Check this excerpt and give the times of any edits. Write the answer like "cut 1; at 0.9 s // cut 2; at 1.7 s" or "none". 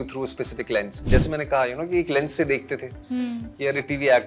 cut 1; at 1.0 s